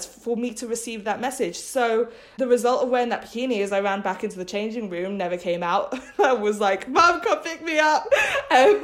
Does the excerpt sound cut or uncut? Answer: cut